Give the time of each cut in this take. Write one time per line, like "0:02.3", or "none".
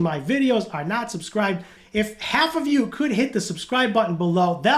0:01.8